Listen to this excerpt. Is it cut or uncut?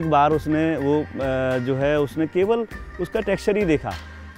uncut